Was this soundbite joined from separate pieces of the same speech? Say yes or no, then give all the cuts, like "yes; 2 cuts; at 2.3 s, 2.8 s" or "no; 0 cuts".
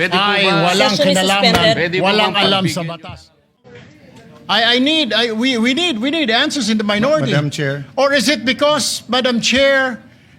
yes; 1 cut; at 3.5 s